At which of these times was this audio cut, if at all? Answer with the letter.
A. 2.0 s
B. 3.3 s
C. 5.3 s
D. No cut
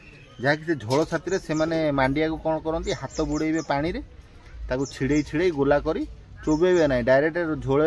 D